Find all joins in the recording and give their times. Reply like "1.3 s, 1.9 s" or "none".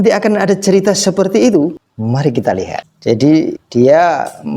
1.9 s, 2.9 s, 3.6 s